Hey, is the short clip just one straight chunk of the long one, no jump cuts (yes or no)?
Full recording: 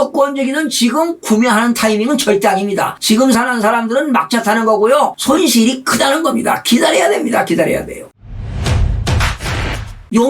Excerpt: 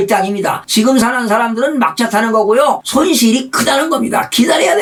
yes